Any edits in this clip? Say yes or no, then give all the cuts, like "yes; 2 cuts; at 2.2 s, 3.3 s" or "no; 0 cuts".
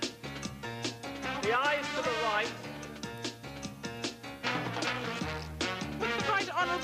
no; 0 cuts